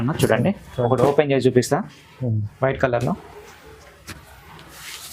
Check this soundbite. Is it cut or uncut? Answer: uncut